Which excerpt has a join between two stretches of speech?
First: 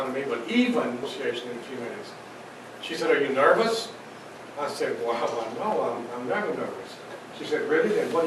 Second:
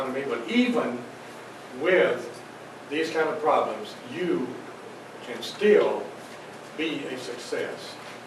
second; 1 cut; at 1.0 s

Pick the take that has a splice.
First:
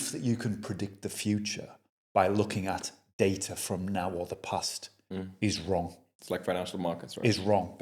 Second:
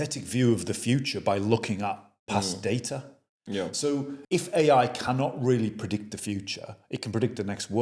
second; 1 cut; at 4.1 s

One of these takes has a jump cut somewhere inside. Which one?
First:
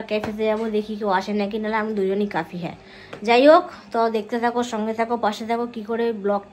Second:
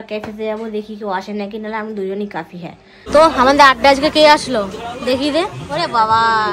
second; 1 cut; at 2.9 s

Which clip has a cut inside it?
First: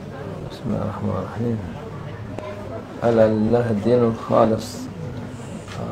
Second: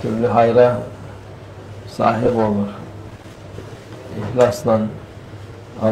second; 1 cut; at 2.8 s

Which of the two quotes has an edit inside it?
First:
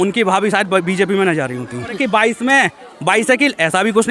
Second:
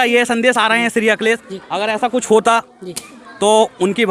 first; 1 cut; at 2.0 s

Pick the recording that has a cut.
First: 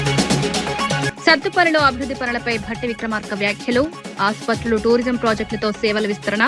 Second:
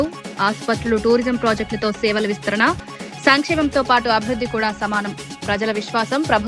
first; 1 cut; at 1.1 s

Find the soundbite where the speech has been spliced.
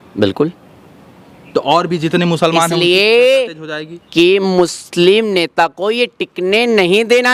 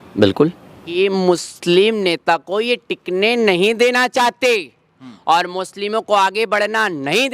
second; 1 cut; at 1.0 s

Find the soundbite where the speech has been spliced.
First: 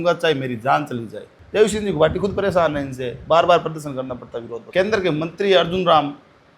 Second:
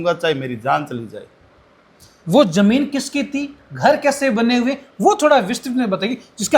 first; 2 cuts; at 1.4 s, 4.6 s

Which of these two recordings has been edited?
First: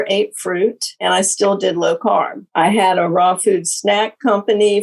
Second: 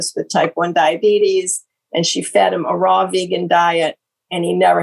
first; 2 cuts; at 0.9 s, 2.4 s

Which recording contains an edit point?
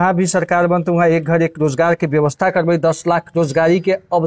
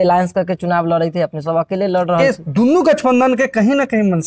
second; 1 cut; at 2.2 s

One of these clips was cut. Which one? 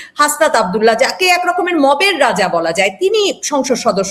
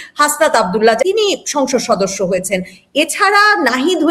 second; 1 cut; at 1.0 s

